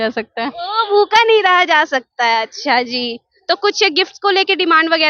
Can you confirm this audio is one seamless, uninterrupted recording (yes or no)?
yes